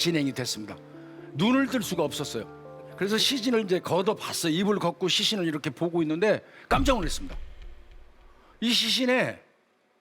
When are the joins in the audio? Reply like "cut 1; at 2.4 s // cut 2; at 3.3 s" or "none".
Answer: cut 1; at 2.9 s